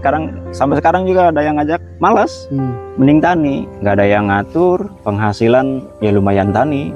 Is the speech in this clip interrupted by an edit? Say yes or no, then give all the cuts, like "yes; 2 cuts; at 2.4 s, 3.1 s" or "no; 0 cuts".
no; 0 cuts